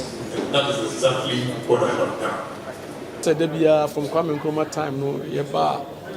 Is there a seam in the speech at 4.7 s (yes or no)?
no